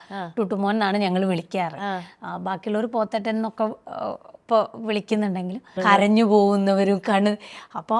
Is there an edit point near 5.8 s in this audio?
yes; 1 cut; at 5.8 s

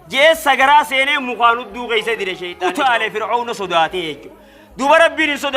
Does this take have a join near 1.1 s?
no; 1 cut; at 2.4 s

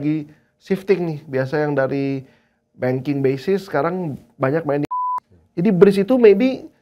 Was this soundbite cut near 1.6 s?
no; 1 cut; at 4.9 s

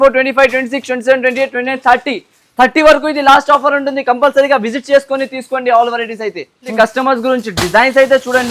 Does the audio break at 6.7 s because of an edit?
yes; 1 cut; at 6.7 s

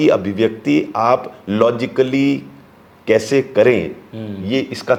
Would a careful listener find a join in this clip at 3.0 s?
no; 0 cuts

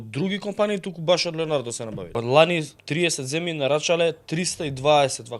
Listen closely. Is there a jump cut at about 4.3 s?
no; 2 cuts; at 2.0 s, 2.8 s

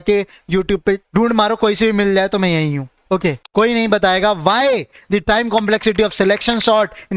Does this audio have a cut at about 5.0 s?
no; 2 cuts; at 1.0 s, 3.4 s

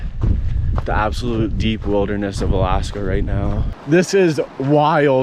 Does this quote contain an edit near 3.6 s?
yes; 1 cut; at 3.6 s

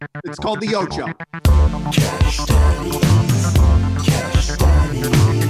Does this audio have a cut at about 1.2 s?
yes; 1 cut; at 1.2 s

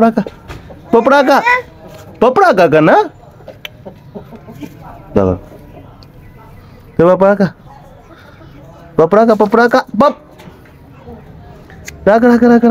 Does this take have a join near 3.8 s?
no; 0 cuts

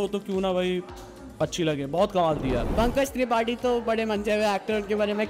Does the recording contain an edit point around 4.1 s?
no; 1 cut; at 2.7 s

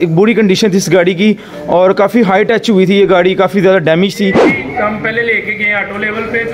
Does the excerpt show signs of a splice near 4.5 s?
yes; 1 cut; at 4.5 s

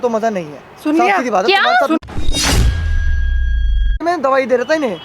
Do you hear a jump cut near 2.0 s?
yes; 2 cuts; at 2.0 s, 4.0 s

